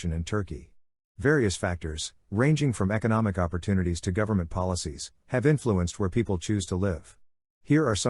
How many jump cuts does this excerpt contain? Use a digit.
1